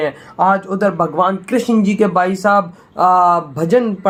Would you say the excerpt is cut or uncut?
uncut